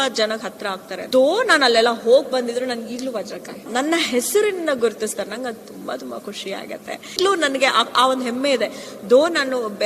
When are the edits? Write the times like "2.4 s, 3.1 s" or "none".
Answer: 1.0 s, 3.6 s, 7.2 s